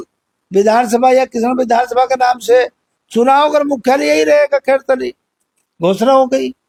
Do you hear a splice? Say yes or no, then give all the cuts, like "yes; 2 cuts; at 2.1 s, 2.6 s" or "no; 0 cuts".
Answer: no; 0 cuts